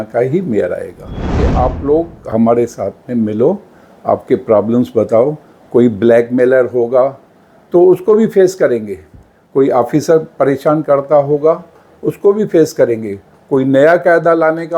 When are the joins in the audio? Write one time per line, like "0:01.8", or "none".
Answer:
0:01.4